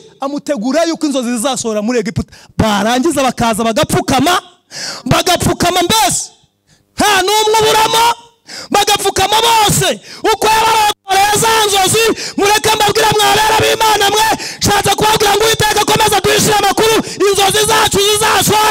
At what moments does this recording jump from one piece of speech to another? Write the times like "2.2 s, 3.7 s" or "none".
none